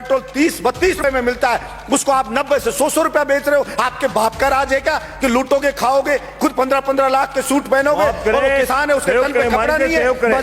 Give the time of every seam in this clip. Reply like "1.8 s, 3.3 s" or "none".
1.0 s